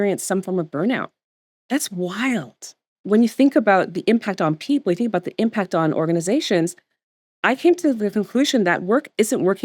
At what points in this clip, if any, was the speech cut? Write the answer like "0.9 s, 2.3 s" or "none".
2.9 s